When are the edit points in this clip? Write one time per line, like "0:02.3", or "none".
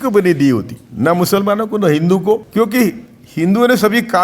0:02.5